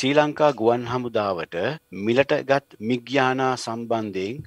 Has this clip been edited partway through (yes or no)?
yes